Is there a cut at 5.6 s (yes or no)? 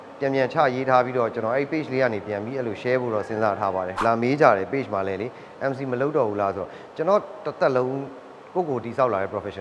no